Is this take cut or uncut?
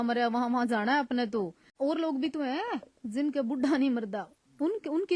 cut